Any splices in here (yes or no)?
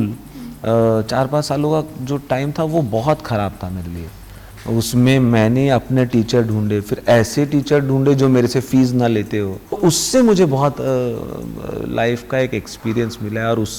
yes